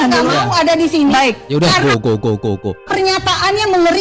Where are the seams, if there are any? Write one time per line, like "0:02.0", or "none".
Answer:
0:02.8